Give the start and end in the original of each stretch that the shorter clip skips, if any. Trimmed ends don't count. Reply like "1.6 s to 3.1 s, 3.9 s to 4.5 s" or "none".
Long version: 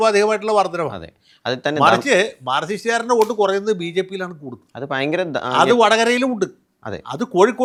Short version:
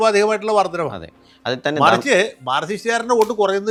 none

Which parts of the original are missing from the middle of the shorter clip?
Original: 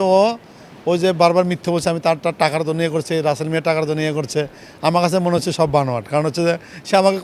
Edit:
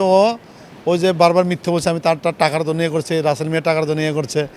none

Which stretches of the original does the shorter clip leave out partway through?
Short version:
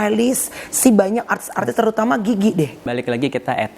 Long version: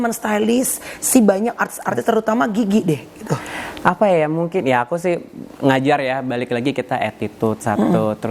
3.1 s to 6.3 s

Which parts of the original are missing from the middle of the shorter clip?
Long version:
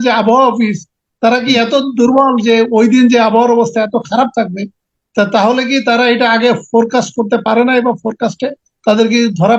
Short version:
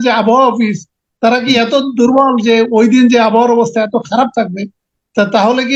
none

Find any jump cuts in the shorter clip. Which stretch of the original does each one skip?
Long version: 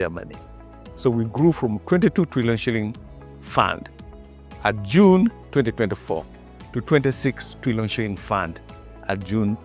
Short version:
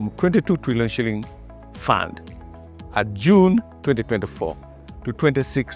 none

